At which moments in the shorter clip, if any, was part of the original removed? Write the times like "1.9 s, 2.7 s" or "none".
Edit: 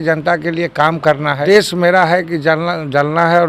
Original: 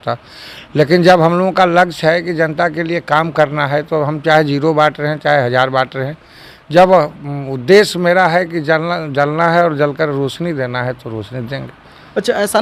1.4 s